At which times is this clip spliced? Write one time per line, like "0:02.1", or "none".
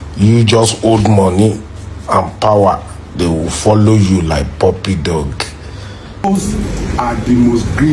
0:06.2